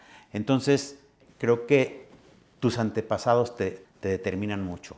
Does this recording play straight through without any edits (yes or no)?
no